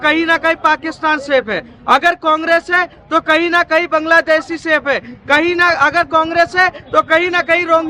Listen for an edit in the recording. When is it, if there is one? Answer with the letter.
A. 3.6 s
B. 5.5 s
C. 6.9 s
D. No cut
D